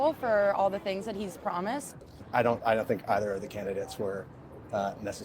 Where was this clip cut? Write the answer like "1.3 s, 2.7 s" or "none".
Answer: 2.0 s